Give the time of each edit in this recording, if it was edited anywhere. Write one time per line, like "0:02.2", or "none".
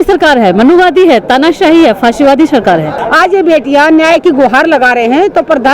0:03.0